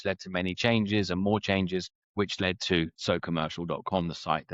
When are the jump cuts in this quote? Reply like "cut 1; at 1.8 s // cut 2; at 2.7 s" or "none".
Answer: cut 1; at 2.0 s // cut 2; at 3.0 s